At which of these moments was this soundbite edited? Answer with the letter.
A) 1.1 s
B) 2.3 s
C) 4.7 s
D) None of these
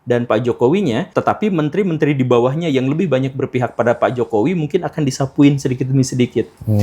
A